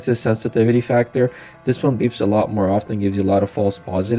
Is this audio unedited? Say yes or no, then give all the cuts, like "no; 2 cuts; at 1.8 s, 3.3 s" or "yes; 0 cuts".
yes; 0 cuts